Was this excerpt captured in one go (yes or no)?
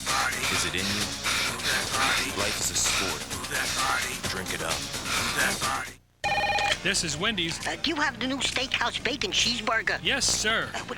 no